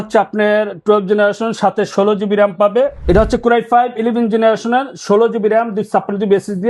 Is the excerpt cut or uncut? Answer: cut